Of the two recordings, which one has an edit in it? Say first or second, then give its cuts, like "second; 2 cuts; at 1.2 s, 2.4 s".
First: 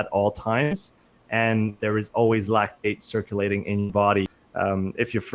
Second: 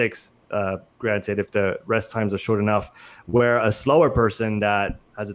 first; 1 cut; at 4.4 s